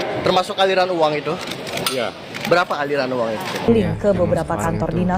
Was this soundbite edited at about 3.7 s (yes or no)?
yes